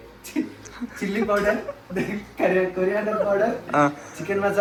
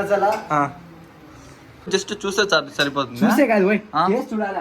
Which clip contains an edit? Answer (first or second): second